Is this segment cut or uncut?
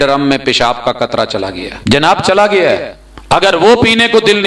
cut